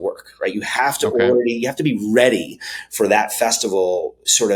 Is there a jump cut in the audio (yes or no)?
no